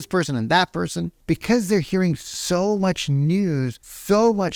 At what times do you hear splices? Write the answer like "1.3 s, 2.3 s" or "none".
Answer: none